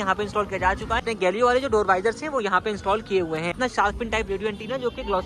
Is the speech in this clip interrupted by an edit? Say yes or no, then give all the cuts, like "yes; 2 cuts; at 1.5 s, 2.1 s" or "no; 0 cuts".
yes; 2 cuts; at 1.0 s, 3.6 s